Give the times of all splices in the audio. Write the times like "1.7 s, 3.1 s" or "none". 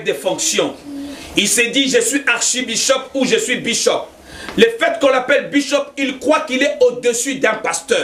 none